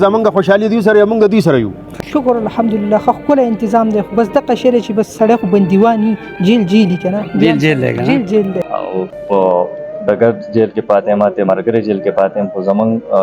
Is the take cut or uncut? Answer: cut